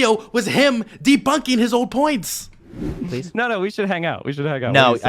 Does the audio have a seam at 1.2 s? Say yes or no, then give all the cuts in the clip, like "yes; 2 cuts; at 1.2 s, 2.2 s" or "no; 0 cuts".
no; 1 cut; at 2.9 s